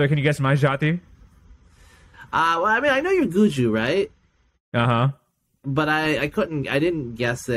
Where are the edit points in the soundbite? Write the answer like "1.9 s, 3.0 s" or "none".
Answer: none